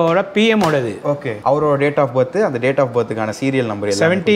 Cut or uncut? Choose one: uncut